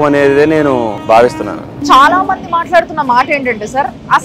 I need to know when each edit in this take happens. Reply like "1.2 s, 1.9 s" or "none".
1.0 s, 1.8 s